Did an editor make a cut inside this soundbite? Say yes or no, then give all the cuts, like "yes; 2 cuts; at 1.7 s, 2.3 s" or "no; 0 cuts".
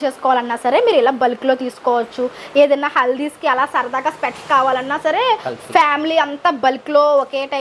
no; 0 cuts